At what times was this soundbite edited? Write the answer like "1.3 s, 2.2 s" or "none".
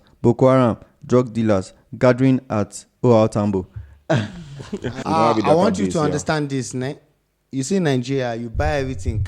4.8 s